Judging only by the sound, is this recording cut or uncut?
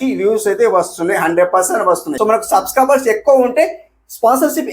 cut